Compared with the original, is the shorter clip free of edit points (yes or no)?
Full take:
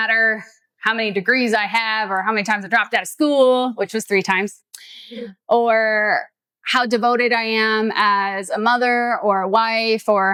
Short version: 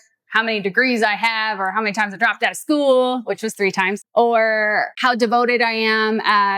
no